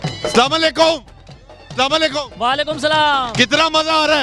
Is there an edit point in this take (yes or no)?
no